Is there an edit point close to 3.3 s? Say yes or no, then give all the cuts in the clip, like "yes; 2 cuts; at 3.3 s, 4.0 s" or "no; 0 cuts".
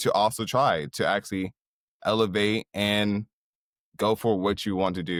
no; 0 cuts